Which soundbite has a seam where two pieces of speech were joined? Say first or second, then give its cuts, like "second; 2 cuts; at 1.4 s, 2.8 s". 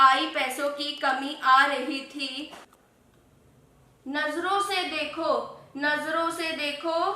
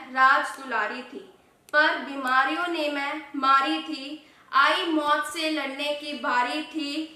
first; 1 cut; at 2.6 s